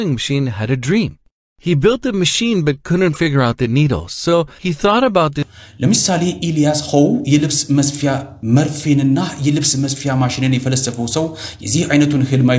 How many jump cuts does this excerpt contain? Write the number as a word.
one